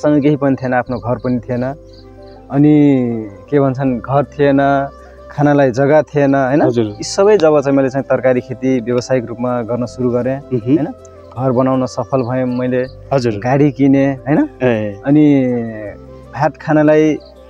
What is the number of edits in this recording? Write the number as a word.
zero